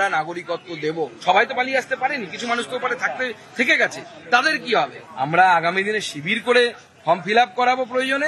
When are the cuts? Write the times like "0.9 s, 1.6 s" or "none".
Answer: none